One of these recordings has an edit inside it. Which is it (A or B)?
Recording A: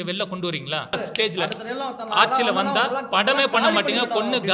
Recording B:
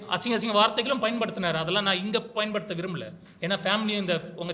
A